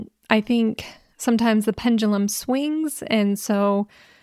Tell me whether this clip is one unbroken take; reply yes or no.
no